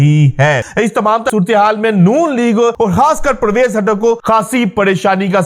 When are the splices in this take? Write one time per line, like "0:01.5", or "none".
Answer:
0:01.2
0:02.7
0:04.2